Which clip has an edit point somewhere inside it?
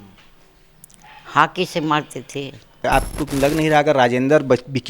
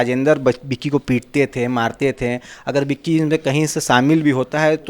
first; 1 cut; at 2.9 s

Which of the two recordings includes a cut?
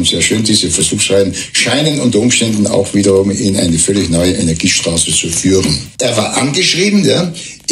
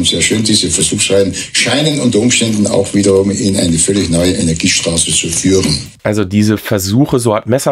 first; 1 cut; at 5.9 s

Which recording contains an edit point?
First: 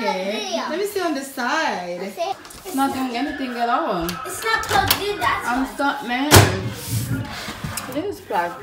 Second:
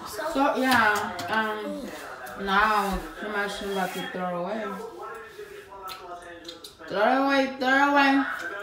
first; 1 cut; at 2.4 s

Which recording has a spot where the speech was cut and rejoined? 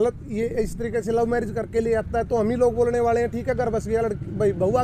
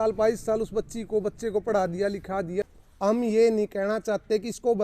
second; 1 cut; at 2.6 s

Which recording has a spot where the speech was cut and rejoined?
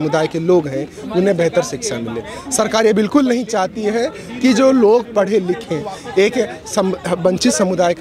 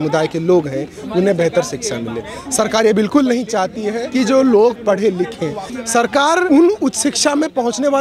second; 2 cuts; at 4.0 s, 5.8 s

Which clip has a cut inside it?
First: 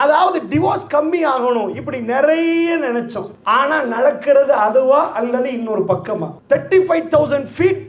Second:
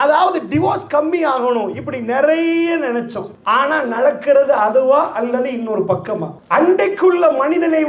first; 1 cut; at 6.3 s

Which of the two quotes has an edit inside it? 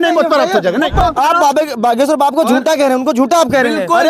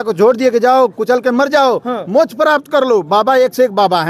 first; 1 cut; at 1.0 s

